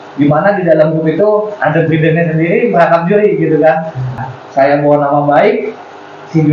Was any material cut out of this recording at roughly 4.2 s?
yes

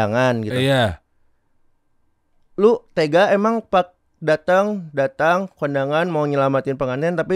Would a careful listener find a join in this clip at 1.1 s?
no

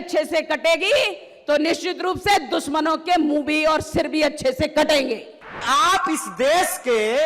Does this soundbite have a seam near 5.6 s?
yes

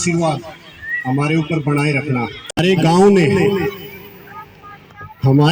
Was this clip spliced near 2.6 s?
yes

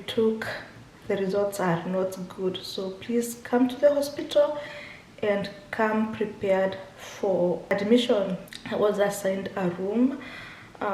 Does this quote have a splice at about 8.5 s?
yes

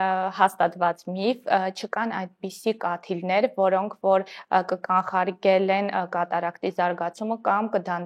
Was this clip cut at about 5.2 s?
no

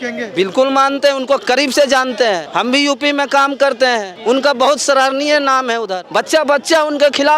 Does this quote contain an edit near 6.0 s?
yes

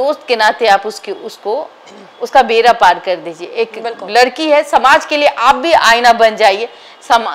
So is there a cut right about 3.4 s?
no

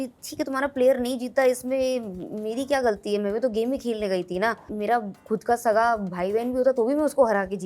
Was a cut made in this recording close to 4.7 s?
yes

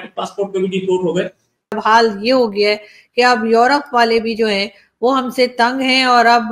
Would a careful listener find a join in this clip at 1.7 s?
yes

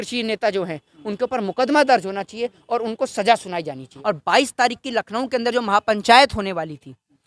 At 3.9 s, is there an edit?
yes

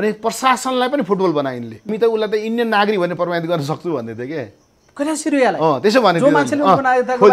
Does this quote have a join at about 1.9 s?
yes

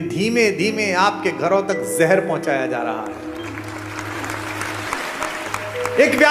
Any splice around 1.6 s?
no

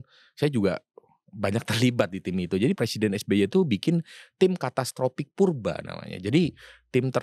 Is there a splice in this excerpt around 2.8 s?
yes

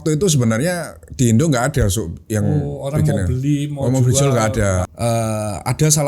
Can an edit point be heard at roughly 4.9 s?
yes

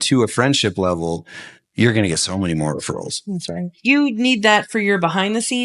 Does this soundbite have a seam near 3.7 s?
yes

